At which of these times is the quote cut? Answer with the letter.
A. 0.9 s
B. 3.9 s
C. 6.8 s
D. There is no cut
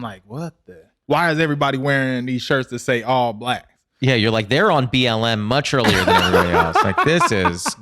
A